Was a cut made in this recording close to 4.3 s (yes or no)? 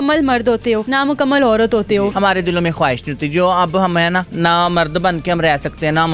yes